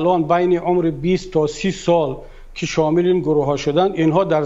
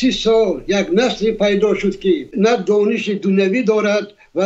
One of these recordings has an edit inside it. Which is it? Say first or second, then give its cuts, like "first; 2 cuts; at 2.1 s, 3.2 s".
second; 1 cut; at 2.3 s